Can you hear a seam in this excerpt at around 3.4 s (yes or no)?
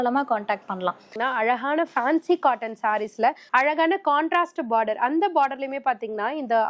yes